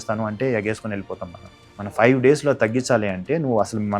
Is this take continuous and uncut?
no; 1 cut; at 2.0 s

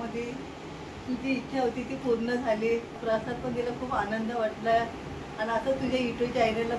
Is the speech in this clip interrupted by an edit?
yes; 1 cut; at 2.9 s

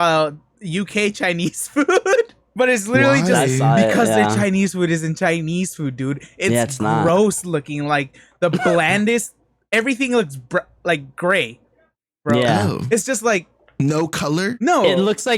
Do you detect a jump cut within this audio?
yes; 1 cut; at 2.4 s

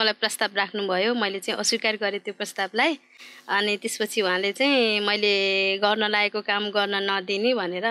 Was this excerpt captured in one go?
yes; 0 cuts

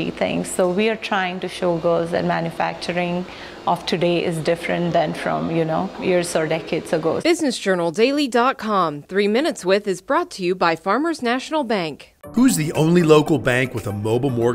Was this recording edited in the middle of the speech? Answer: yes; 1 cut; at 7.2 s

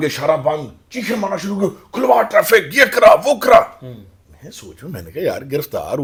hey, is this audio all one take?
yes; 0 cuts

